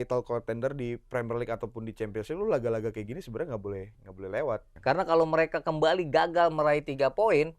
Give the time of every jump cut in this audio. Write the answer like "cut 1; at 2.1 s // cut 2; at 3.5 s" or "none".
cut 1; at 4.7 s

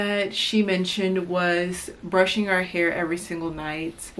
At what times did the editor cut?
none

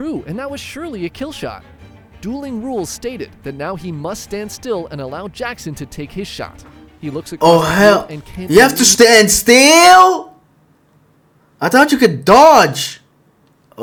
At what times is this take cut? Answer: none

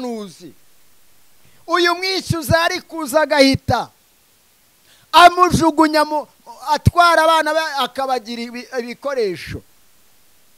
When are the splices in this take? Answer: none

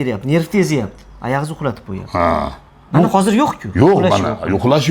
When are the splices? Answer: none

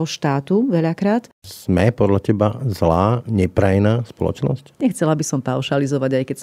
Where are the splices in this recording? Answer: cut 1; at 1.3 s // cut 2; at 4.6 s

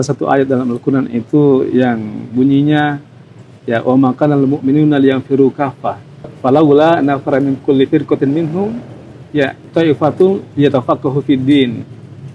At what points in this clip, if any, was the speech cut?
cut 1; at 6.3 s // cut 2; at 9.6 s

